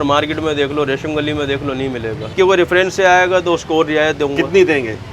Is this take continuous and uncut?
no; 1 cut; at 2.3 s

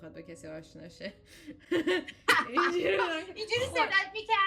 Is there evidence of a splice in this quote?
no; 0 cuts

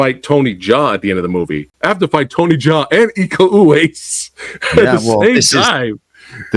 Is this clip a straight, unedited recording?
no; 1 cut; at 1.7 s

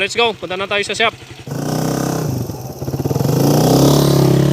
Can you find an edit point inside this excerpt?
yes; 1 cut; at 1.5 s

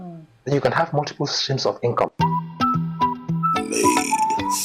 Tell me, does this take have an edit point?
yes; 1 cut; at 2.1 s

